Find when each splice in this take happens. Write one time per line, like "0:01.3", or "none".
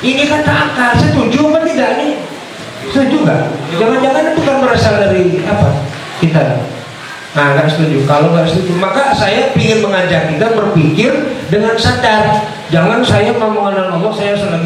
none